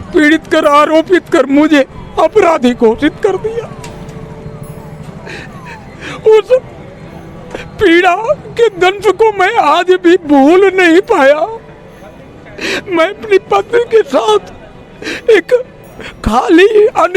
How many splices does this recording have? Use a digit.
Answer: 0